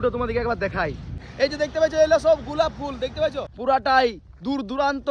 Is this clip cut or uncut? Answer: cut